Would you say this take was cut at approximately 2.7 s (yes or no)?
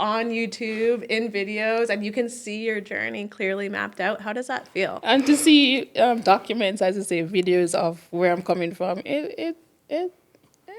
no